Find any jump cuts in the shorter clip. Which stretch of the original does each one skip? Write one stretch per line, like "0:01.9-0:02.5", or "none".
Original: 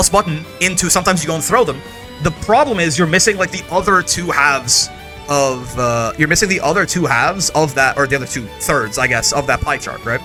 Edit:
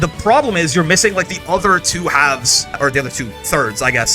0:05.0-0:07.9